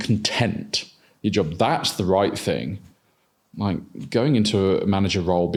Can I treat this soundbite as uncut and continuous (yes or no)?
yes